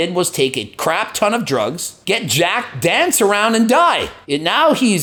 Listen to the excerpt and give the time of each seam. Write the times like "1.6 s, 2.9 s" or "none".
none